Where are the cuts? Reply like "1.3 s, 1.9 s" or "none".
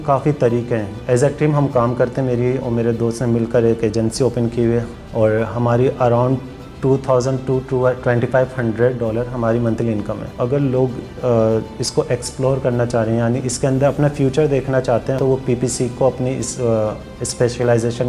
0.9 s, 4.9 s, 10.4 s, 15.2 s

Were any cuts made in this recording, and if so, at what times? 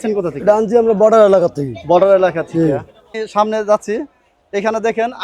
3.1 s

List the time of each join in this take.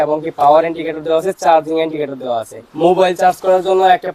none

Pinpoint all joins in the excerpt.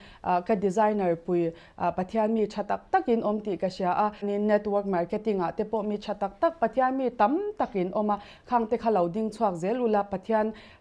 4.3 s

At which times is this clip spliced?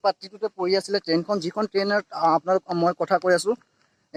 none

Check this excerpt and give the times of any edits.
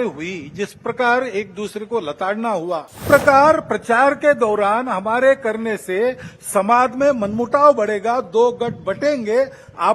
3.0 s

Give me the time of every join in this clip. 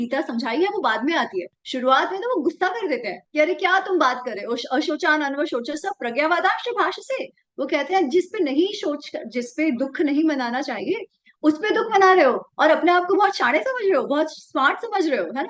none

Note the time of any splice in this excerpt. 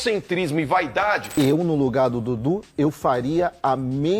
1.3 s

